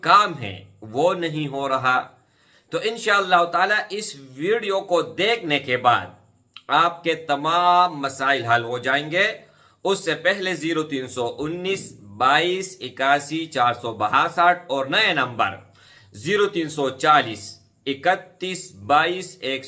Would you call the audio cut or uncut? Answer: uncut